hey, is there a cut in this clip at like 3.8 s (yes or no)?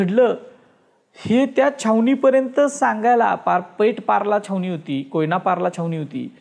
no